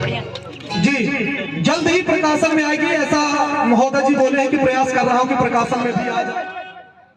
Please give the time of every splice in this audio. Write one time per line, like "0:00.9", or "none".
0:06.1